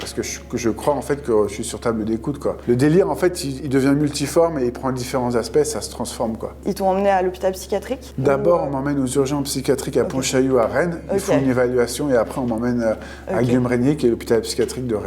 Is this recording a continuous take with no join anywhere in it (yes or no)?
yes